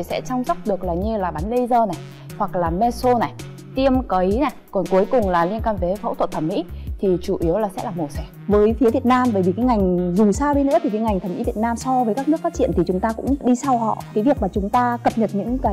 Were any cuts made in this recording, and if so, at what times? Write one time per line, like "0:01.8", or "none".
0:08.3